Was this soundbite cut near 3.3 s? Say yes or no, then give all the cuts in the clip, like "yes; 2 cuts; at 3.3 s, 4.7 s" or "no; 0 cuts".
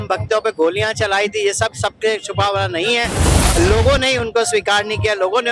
yes; 1 cut; at 3.3 s